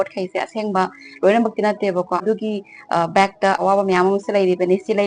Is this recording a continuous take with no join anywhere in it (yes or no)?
no